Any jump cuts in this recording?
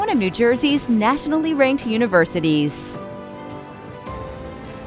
yes; 1 cut; at 2.7 s

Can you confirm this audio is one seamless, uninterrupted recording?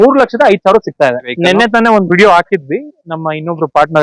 no; 1 cut; at 1.3 s

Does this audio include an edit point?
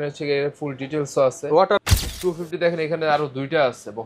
yes; 1 cut; at 1.9 s

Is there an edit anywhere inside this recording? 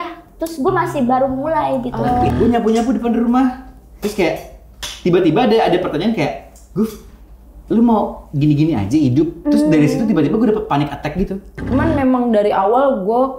yes; 2 cuts; at 2.3 s, 11.6 s

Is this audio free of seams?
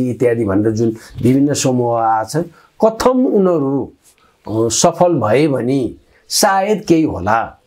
yes; 0 cuts

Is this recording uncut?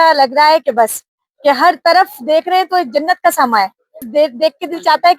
no; 1 cut; at 4.1 s

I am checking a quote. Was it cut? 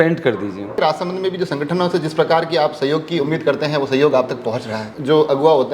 yes; 2 cuts; at 0.8 s, 4.8 s

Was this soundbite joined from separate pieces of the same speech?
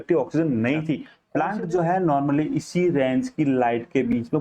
yes; 1 cut; at 1.1 s

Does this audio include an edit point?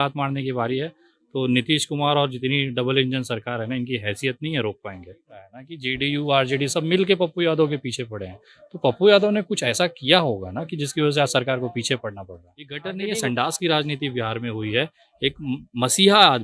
yes; 2 cuts; at 5.4 s, 12.8 s

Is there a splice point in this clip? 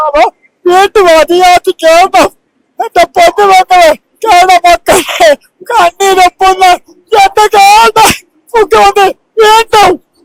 no; 0 cuts

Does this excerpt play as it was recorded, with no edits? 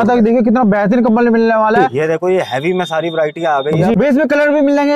no; 2 cuts; at 1.9 s, 3.9 s

